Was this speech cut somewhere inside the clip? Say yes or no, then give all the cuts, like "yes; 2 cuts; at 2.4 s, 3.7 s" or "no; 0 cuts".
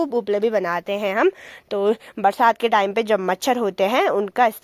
no; 0 cuts